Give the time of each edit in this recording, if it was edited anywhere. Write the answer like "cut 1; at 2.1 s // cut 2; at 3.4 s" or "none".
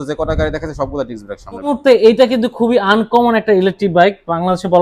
cut 1; at 1.6 s